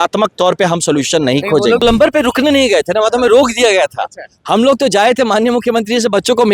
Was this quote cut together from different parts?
yes; 1 cut; at 1.8 s

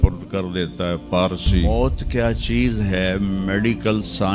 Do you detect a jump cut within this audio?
yes; 1 cut; at 1.7 s

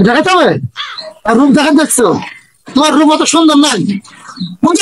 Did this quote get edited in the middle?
no; 0 cuts

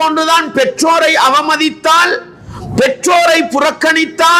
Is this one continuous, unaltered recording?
yes; 0 cuts

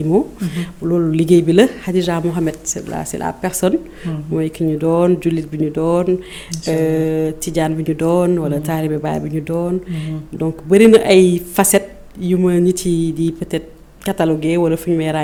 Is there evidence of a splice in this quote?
no; 0 cuts

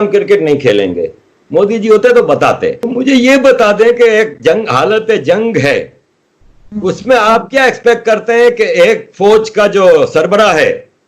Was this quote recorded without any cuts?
no; 1 cut; at 2.8 s

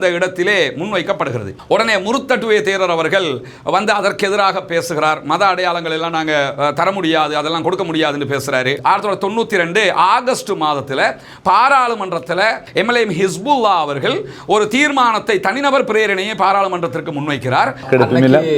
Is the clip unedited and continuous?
no; 4 cuts; at 1.6 s, 8.7 s, 12.6 s, 17.9 s

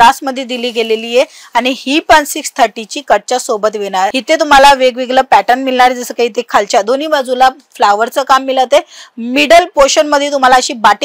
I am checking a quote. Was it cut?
no; 0 cuts

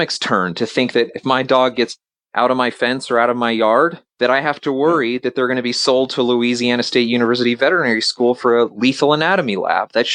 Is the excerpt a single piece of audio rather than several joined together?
no; 1 cut; at 4.0 s

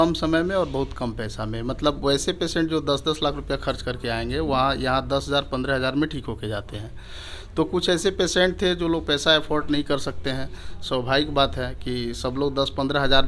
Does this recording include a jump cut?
no; 0 cuts

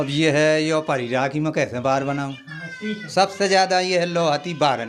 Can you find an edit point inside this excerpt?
no; 0 cuts

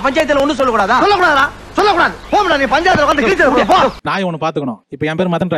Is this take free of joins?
no; 1 cut; at 4.0 s

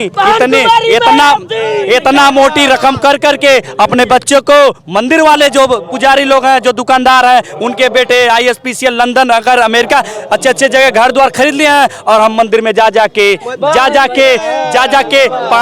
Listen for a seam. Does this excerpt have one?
no; 0 cuts

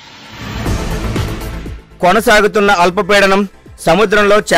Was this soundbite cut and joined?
no; 0 cuts

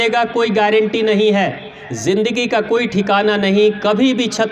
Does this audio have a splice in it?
yes; 1 cut; at 1.8 s

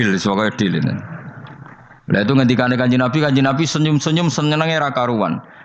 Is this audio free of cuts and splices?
yes; 0 cuts

